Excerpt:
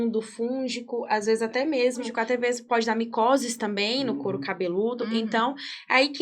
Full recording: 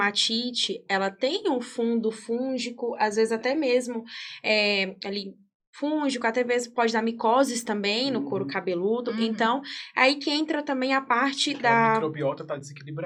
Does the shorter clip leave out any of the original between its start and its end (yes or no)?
yes